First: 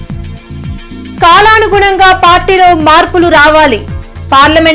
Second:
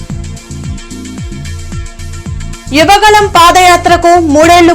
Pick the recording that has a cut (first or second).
first